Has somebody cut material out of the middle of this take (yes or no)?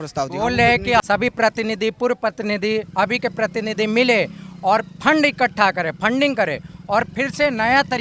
yes